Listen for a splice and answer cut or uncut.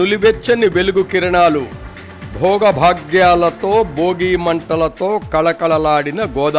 uncut